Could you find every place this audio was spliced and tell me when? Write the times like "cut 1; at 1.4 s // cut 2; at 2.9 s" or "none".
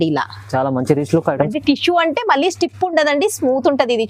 cut 1; at 1.5 s